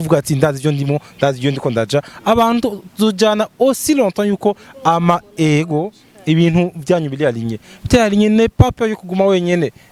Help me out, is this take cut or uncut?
uncut